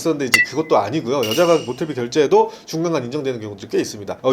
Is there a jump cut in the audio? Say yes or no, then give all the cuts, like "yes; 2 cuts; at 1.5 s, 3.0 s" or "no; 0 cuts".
no; 0 cuts